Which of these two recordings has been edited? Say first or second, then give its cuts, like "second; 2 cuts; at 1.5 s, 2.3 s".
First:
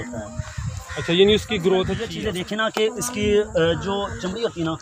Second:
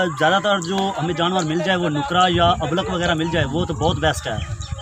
first; 1 cut; at 2.0 s